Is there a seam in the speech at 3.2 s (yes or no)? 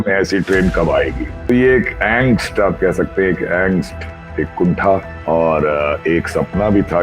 no